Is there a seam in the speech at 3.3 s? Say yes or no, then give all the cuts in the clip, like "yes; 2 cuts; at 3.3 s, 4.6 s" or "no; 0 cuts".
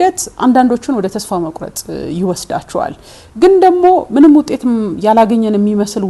no; 0 cuts